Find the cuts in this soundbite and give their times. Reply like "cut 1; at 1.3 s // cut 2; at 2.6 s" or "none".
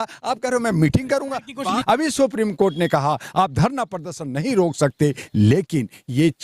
cut 1; at 1.8 s